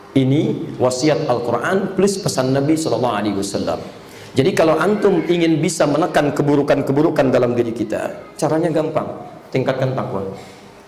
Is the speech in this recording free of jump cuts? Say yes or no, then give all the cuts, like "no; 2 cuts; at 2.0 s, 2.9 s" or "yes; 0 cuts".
yes; 0 cuts